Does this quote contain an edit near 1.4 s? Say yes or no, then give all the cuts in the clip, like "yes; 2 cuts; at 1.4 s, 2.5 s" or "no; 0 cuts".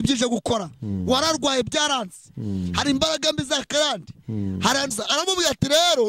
no; 1 cut; at 4.9 s